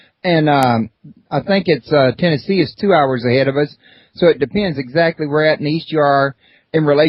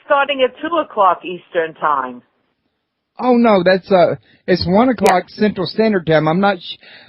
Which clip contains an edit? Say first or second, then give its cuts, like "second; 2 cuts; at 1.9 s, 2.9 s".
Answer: second; 1 cut; at 5.3 s